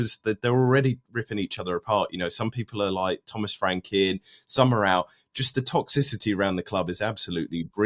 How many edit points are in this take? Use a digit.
0